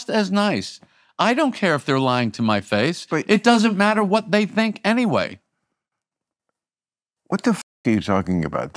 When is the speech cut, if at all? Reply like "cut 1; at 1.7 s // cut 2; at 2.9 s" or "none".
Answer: none